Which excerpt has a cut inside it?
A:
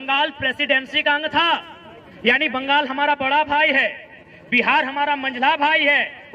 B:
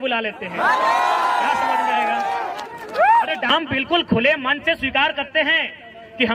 B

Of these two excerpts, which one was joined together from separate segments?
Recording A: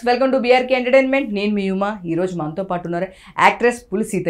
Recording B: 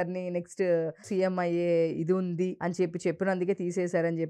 B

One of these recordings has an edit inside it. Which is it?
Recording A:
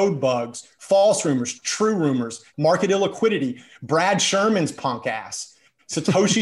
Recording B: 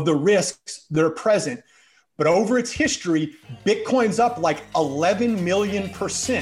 A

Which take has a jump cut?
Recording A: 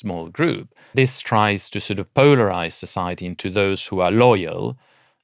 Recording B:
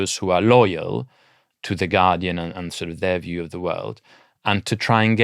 A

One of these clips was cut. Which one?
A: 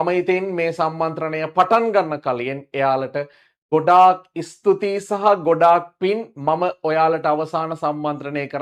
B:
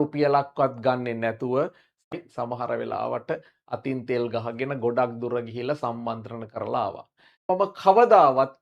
B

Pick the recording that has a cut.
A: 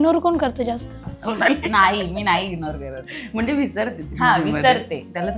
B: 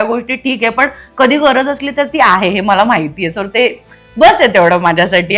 A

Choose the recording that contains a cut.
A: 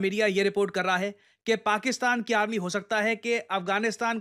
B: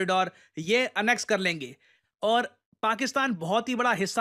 B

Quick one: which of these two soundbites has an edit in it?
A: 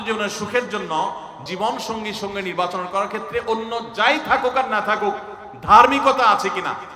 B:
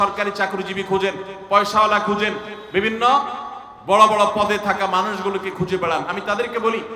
A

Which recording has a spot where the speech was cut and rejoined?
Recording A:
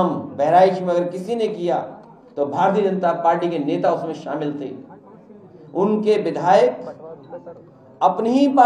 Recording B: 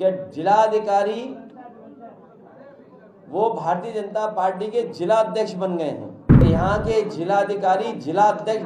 B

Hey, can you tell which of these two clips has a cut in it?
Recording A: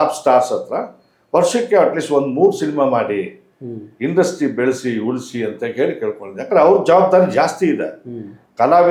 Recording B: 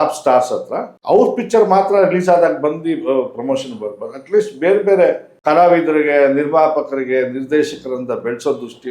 B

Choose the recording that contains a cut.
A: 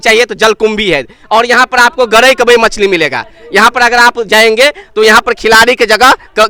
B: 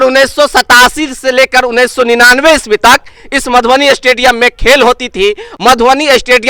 B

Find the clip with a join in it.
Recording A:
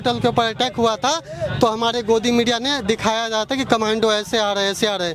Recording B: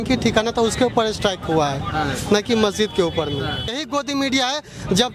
B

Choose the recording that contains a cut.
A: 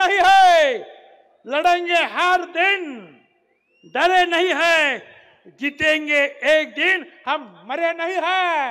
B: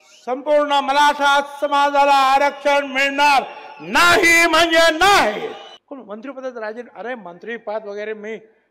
B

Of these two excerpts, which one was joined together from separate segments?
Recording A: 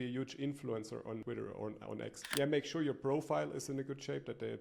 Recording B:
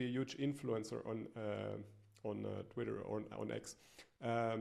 A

